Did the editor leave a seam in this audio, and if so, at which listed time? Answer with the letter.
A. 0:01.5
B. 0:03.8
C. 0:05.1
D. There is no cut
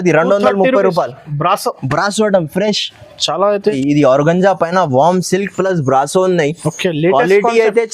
B